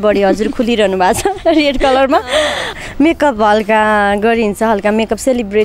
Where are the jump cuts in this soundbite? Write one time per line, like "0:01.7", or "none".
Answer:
0:02.6